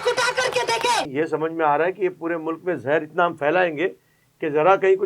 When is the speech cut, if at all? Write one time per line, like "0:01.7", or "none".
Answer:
0:01.1